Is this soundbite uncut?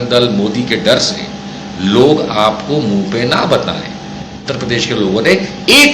no; 1 cut; at 4.4 s

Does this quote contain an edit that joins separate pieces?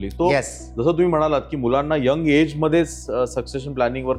no; 0 cuts

